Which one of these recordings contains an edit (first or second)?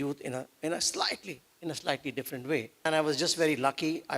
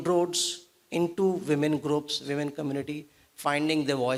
first